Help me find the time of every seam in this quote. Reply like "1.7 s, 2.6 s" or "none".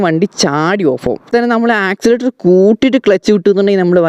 1.3 s